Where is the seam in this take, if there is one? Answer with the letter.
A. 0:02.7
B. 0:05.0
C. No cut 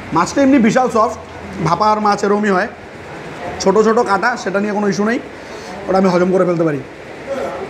C